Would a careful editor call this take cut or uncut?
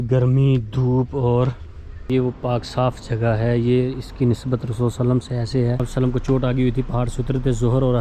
cut